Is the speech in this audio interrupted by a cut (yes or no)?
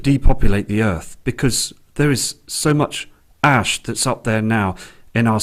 no